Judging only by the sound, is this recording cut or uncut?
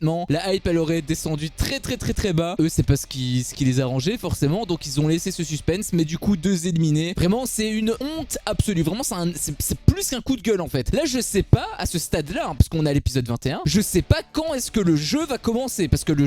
cut